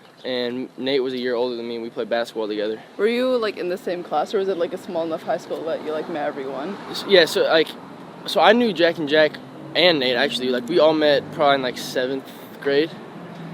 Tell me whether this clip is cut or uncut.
uncut